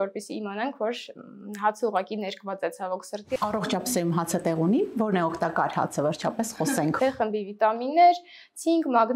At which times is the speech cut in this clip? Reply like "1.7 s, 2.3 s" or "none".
3.4 s, 7.0 s